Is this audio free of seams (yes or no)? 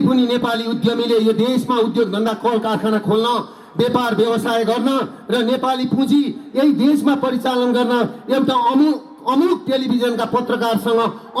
yes